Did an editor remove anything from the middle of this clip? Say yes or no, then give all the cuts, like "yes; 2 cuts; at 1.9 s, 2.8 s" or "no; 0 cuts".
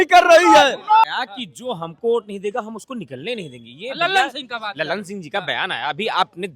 yes; 1 cut; at 1.0 s